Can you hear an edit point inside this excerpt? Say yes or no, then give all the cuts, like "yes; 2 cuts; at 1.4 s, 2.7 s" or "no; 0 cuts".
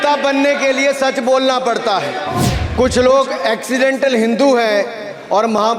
yes; 1 cut; at 2.3 s